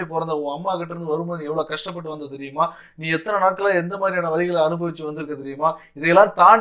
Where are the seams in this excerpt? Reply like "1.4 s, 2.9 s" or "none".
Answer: none